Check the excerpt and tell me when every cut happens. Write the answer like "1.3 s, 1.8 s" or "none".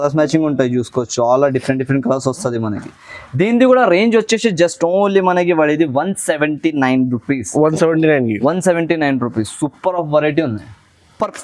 none